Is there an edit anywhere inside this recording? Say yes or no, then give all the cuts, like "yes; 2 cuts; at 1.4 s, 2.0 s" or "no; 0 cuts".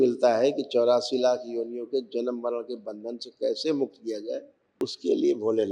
yes; 1 cut; at 4.6 s